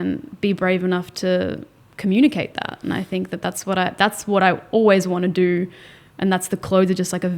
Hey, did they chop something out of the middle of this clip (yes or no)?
no